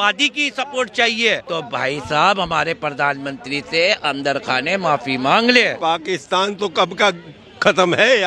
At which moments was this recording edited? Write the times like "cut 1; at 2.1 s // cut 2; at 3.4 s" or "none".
cut 1; at 1.4 s // cut 2; at 5.8 s